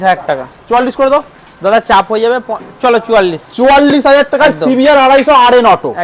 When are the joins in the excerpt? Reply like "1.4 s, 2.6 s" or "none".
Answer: none